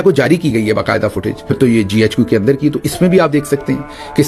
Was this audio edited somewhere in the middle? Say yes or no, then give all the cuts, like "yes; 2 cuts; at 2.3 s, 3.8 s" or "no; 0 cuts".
yes; 1 cut; at 1.5 s